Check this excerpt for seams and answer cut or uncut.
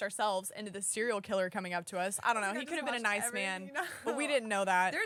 uncut